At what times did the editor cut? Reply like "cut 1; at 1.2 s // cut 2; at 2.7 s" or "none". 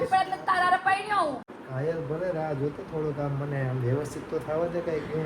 cut 1; at 1.5 s